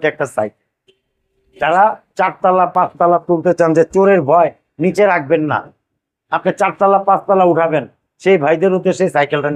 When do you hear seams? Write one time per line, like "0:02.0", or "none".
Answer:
none

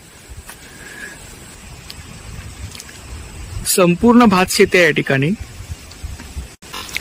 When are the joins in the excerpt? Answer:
0:01.5

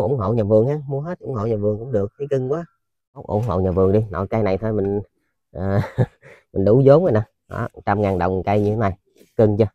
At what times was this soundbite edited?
0:03.3

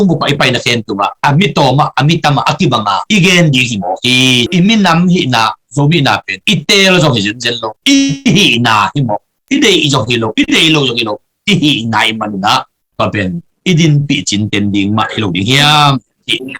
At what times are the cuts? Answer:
0:04.5

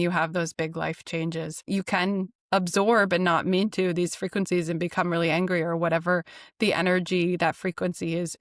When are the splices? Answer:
0:01.6

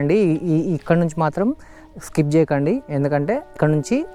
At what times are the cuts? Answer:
none

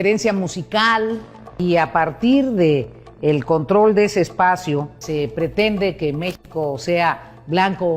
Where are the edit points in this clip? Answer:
0:01.5
0:05.0

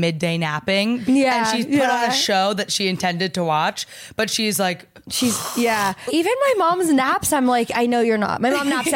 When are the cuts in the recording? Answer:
0:01.0
0:06.0

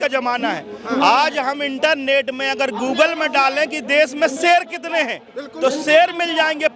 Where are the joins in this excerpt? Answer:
none

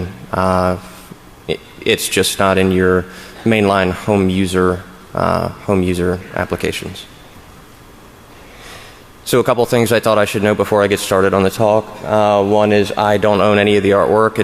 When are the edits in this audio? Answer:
0:08.3

